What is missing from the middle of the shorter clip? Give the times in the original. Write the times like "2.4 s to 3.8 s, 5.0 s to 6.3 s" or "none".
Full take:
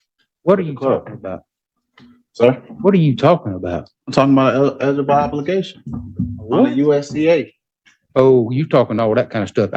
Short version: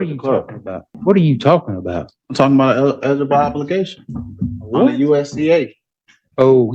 1.5 s to 2.7 s